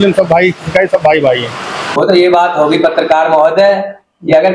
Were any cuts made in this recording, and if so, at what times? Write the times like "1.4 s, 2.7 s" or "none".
1.9 s